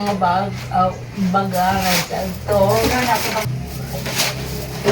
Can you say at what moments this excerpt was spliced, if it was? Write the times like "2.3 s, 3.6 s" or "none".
3.5 s